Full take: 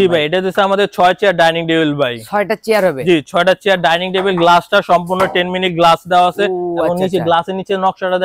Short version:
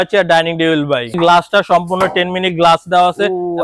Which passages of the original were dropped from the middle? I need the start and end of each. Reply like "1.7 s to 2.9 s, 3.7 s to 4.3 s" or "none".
2.2 s to 4.3 s